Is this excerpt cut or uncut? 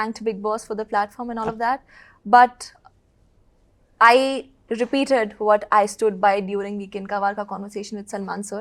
uncut